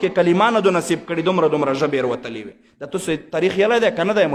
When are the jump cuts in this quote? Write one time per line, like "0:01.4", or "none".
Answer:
none